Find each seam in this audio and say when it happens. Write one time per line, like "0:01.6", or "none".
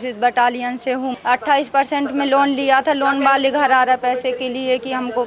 0:01.2